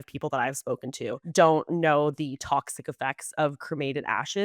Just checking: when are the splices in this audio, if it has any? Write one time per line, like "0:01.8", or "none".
0:01.2